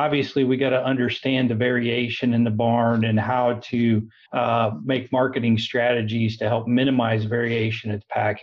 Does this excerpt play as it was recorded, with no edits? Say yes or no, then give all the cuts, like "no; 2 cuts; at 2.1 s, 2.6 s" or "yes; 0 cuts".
no; 1 cut; at 4.2 s